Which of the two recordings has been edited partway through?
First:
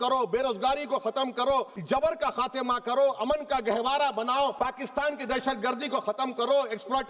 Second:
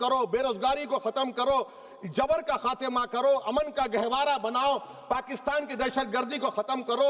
first; 2 cuts; at 1.8 s, 4.5 s

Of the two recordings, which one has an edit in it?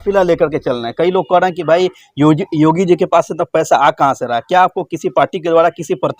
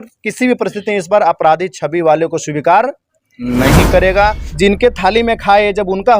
second; 1 cut; at 4.5 s

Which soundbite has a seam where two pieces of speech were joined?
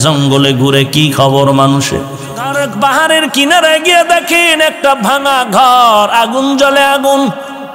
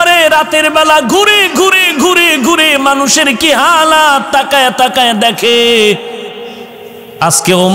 first; 1 cut; at 2.4 s

